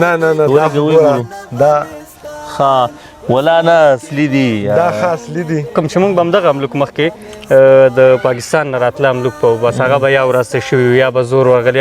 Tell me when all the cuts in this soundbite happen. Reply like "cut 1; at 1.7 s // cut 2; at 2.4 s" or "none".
cut 1; at 5.7 s